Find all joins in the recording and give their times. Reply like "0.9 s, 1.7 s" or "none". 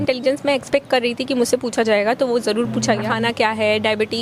3.1 s